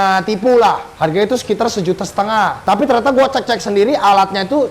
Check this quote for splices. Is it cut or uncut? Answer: cut